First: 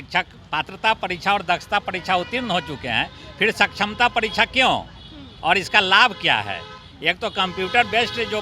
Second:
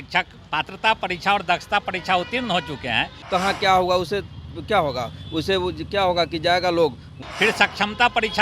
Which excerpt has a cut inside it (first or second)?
second